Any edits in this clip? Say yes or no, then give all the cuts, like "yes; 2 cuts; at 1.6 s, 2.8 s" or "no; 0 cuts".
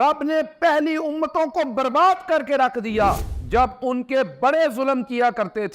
yes; 1 cut; at 3.3 s